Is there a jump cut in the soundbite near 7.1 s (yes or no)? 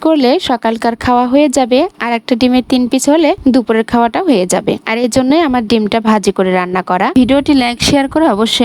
yes